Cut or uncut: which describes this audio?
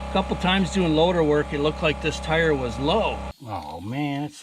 cut